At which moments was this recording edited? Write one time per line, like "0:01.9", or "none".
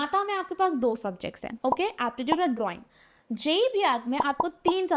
0:01.5